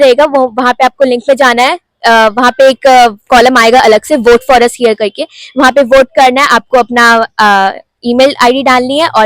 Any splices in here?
no; 0 cuts

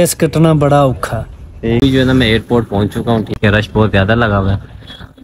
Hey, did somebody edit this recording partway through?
yes; 2 cuts; at 1.8 s, 3.3 s

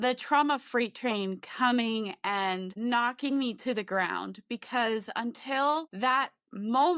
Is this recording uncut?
no; 1 cut; at 5.9 s

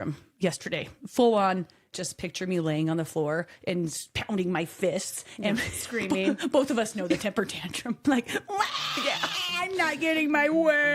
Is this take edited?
yes; 3 cuts; at 1.9 s, 4.1 s, 8.0 s

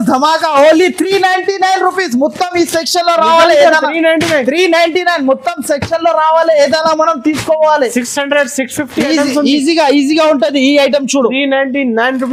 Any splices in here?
no; 0 cuts

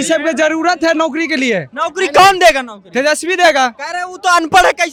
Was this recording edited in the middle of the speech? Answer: no; 0 cuts

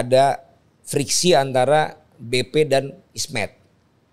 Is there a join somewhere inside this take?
no; 0 cuts

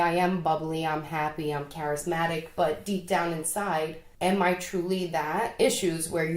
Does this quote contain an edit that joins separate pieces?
yes; 2 cuts; at 4.0 s, 5.5 s

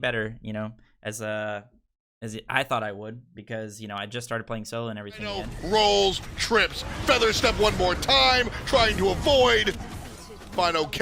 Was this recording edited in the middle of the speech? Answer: yes; 1 cut; at 5.2 s

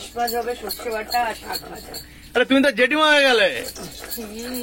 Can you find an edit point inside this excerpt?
no; 0 cuts

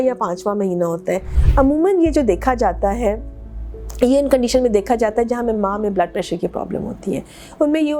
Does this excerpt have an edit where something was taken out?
yes; 1 cut; at 1.4 s

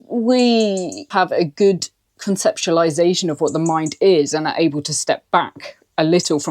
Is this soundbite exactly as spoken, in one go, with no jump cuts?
no; 1 cut; at 1.1 s

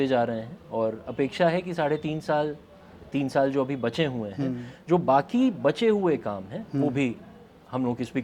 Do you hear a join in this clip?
no; 0 cuts

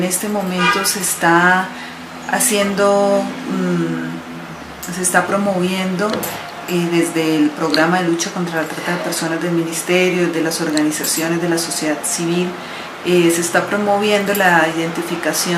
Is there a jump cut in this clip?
no; 0 cuts

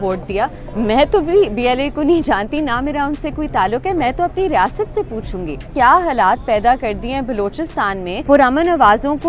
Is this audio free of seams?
no; 2 cuts; at 5.7 s, 8.2 s

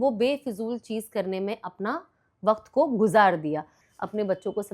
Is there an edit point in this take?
yes; 1 cut; at 3.8 s

